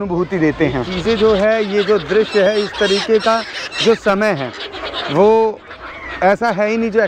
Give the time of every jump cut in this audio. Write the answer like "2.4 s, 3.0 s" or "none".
0.9 s